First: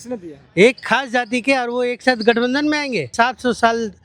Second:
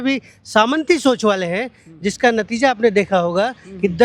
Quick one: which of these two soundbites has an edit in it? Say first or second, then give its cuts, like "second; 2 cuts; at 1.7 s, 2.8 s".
first; 1 cut; at 3.1 s